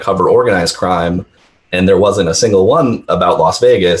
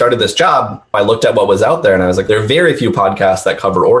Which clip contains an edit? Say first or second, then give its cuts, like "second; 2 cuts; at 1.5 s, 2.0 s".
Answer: second; 2 cuts; at 1.0 s, 2.2 s